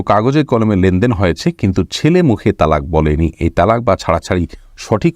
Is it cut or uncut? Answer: uncut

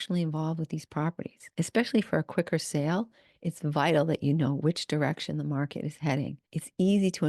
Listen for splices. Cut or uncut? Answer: cut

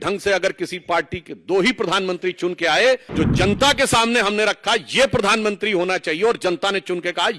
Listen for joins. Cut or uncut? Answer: cut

